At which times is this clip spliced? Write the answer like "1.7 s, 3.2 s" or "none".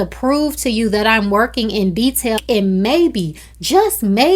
2.4 s

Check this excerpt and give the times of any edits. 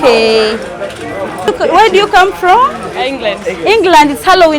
1.5 s

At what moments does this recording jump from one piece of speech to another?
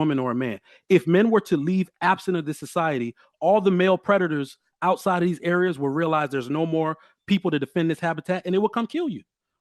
none

